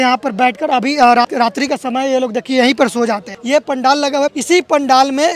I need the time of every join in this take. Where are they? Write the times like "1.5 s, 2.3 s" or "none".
1.2 s, 3.3 s, 4.4 s